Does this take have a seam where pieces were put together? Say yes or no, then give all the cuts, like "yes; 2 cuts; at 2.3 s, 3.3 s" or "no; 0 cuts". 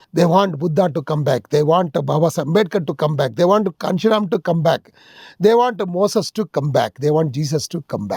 no; 0 cuts